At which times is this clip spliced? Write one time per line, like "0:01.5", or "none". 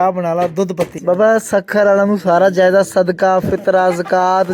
0:00.9